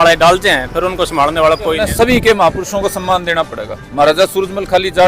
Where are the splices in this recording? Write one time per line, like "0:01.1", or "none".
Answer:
0:01.8